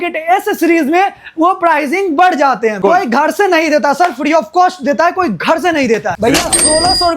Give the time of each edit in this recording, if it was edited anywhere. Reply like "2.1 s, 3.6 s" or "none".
2.8 s, 6.2 s